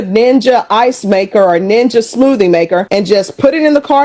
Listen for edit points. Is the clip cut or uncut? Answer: uncut